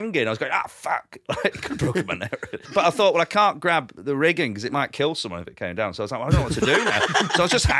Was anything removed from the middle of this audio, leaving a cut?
yes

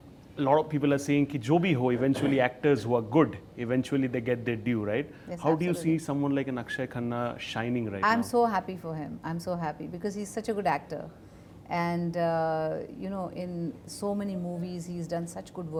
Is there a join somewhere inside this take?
no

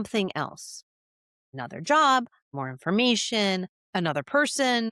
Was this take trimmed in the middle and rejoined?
yes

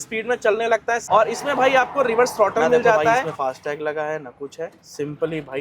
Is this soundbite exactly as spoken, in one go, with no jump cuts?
no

